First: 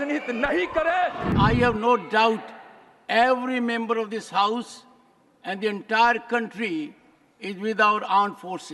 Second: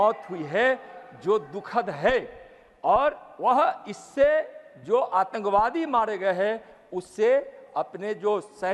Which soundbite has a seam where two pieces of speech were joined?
first; 1 cut; at 1.3 s

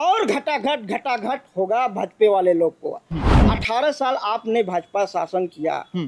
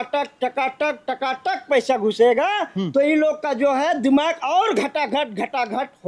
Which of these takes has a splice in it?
first; 1 cut; at 3.3 s

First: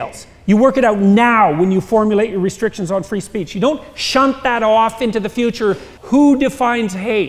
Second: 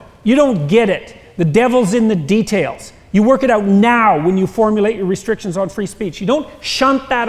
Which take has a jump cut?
first; 1 cut; at 5.9 s

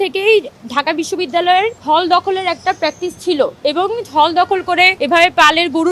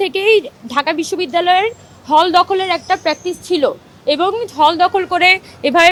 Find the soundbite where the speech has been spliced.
first; 3 cuts; at 1.8 s, 3.6 s, 5.0 s

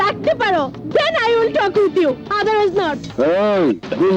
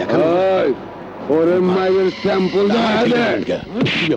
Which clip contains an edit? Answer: first; 1 cut; at 3.0 s

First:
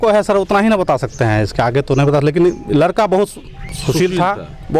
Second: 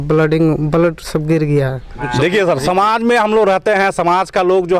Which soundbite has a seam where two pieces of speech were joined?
second; 1 cut; at 2.0 s

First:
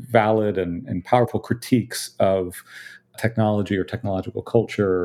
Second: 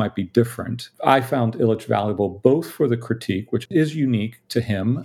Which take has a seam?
second; 1 cut; at 3.7 s

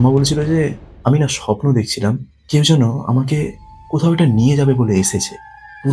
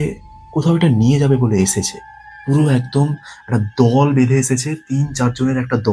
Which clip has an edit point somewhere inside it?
first; 2 cuts; at 0.9 s, 2.3 s

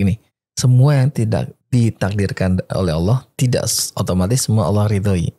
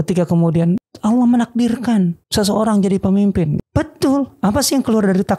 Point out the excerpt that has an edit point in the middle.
second; 3 cuts; at 0.9 s, 2.2 s, 3.6 s

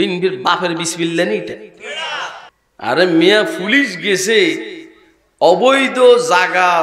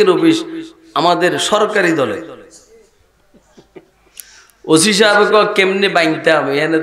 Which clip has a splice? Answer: first; 1 cut; at 2.4 s

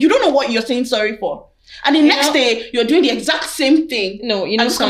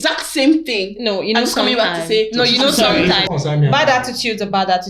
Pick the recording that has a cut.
second; 1 cut; at 3.3 s

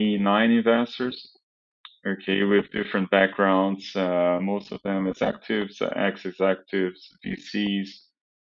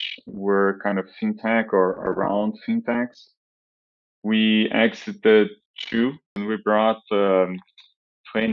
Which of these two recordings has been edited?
second; 1 cut; at 6.3 s

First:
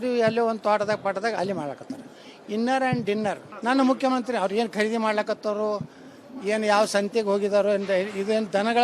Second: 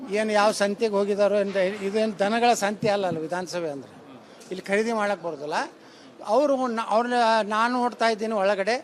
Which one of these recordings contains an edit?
first; 1 cut; at 3.5 s

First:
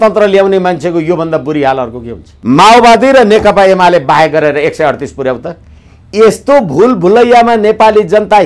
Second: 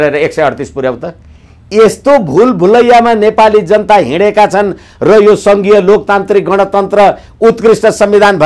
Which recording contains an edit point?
first; 1 cut; at 2.3 s

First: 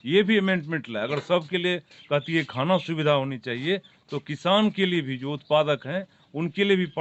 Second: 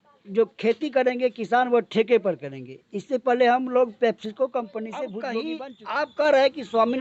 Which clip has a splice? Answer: second; 1 cut; at 5.3 s

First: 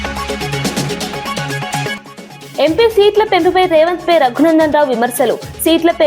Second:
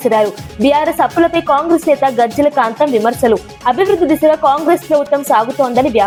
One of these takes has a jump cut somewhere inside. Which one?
first; 1 cut; at 1.9 s

